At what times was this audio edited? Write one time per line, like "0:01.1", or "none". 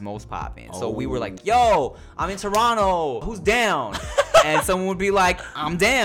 0:01.4
0:03.3